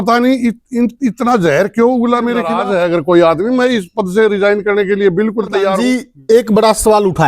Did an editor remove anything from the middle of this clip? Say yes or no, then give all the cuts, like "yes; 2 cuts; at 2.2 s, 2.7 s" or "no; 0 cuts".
yes; 2 cuts; at 2.6 s, 5.8 s